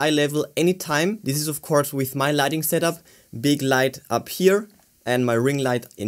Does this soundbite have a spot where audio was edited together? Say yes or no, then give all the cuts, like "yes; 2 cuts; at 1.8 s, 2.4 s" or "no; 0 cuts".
no; 0 cuts